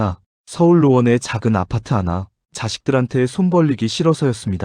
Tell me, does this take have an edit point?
yes; 1 cut; at 2.4 s

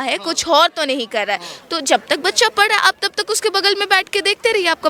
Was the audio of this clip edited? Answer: no; 0 cuts

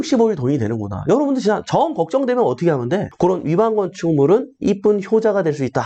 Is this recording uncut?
no; 1 cut; at 3.1 s

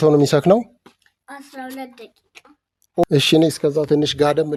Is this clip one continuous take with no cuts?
yes; 0 cuts

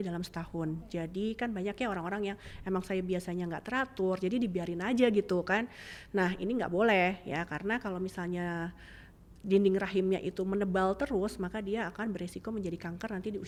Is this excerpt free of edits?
yes; 0 cuts

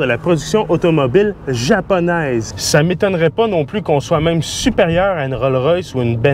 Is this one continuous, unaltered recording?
no; 1 cut; at 2.5 s

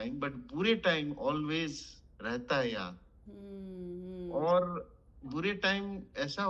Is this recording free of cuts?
yes; 0 cuts

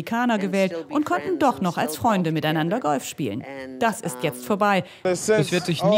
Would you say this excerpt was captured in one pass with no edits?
no; 1 cut; at 5.0 s

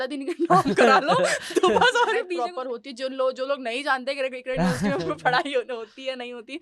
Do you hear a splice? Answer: yes; 1 cut; at 2.3 s

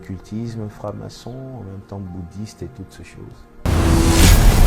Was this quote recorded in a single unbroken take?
no; 1 cut; at 3.5 s

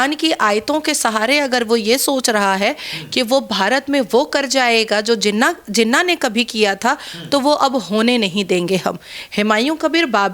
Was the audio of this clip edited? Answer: no; 0 cuts

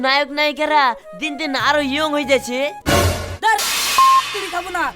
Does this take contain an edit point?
yes; 1 cut; at 2.8 s

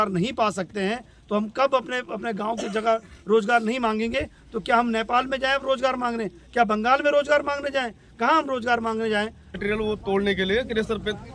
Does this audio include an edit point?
yes; 1 cut; at 9.6 s

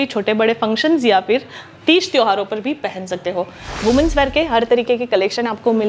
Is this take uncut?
no; 1 cut; at 3.6 s

